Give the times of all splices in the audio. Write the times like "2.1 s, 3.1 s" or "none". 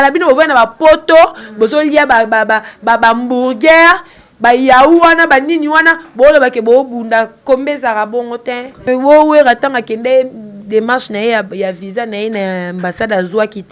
8.8 s